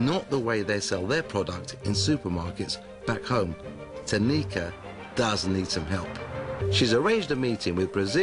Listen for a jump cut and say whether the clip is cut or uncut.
uncut